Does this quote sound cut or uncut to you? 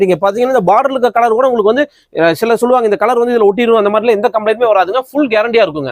uncut